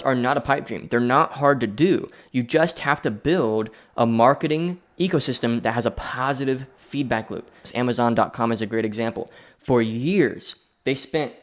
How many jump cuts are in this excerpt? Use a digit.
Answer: 1